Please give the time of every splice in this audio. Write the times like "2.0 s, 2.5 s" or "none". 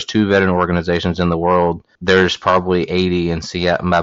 1.9 s